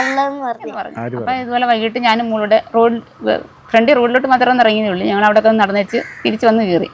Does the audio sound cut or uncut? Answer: cut